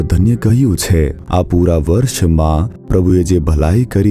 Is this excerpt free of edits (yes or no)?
no